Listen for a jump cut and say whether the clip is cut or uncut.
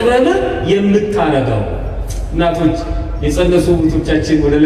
uncut